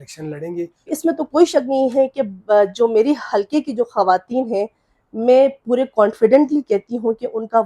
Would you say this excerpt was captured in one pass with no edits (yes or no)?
no